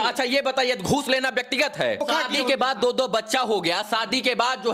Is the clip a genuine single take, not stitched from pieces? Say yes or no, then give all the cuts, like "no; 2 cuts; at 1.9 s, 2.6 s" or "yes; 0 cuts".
no; 1 cut; at 2.0 s